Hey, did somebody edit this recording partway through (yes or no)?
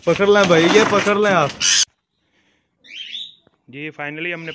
yes